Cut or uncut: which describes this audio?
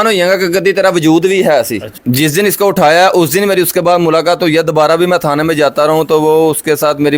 uncut